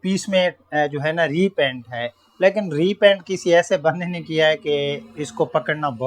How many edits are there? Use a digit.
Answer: 0